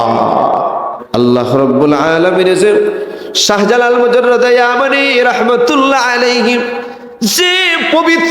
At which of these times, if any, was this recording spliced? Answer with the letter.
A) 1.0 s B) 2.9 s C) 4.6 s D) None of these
A